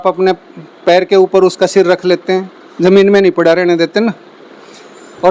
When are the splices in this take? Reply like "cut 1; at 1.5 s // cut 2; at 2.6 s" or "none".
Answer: none